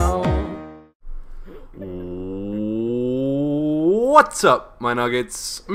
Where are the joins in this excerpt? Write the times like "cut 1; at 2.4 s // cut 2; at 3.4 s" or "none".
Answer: none